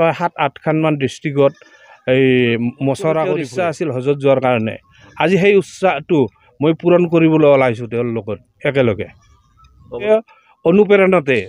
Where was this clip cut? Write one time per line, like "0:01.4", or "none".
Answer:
0:03.5
0:10.1